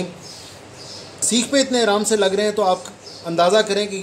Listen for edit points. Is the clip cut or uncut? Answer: cut